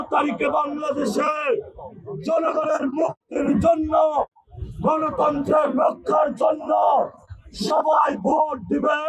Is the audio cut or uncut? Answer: uncut